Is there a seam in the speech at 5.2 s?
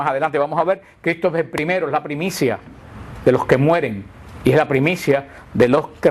yes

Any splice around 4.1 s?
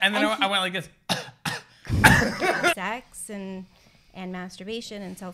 no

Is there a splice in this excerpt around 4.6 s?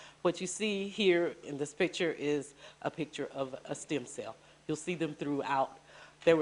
yes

